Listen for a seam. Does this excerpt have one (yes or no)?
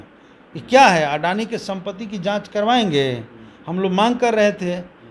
no